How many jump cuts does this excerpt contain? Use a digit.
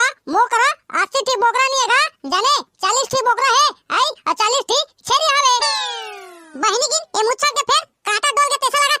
0